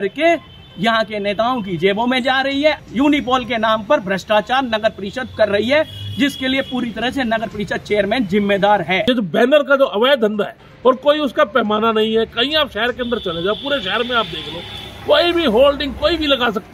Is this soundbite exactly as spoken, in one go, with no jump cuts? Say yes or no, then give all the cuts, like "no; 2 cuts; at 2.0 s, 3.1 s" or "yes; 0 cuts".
no; 3 cuts; at 2.8 s, 9.0 s, 10.7 s